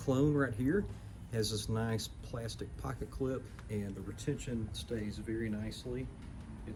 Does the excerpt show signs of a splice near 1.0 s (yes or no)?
no